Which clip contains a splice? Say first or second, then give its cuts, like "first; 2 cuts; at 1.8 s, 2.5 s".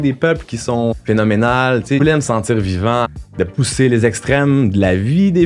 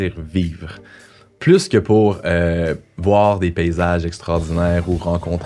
first; 3 cuts; at 0.9 s, 2.0 s, 3.2 s